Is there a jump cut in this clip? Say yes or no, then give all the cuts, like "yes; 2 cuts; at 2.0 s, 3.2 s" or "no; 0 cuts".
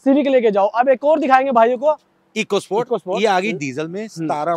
no; 0 cuts